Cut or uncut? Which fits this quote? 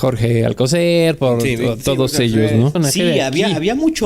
cut